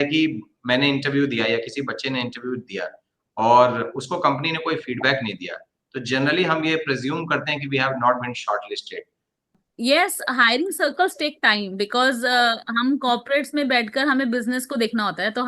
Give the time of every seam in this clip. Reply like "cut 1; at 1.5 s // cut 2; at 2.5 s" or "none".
cut 1; at 9.5 s